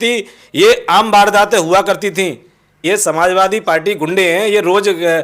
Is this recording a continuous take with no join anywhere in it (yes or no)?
no